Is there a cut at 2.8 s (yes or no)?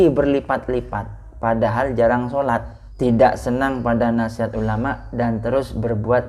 yes